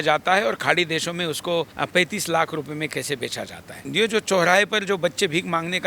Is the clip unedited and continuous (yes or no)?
no